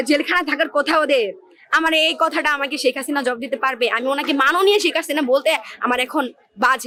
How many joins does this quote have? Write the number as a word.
zero